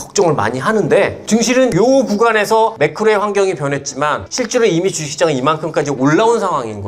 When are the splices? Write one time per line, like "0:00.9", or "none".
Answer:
0:01.6
0:02.7
0:04.3